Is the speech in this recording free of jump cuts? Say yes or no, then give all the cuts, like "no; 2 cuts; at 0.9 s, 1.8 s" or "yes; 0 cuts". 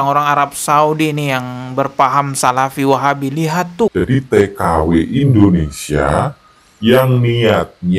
no; 1 cut; at 3.9 s